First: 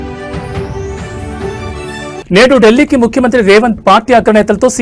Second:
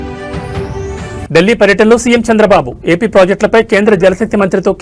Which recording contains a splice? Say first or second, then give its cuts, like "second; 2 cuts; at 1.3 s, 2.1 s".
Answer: second; 1 cut; at 1.2 s